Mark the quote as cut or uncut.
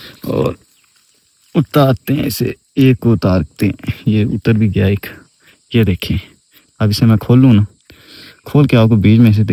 uncut